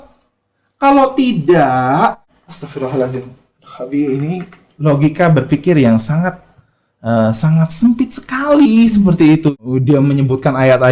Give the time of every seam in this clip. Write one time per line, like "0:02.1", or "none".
0:02.3
0:09.5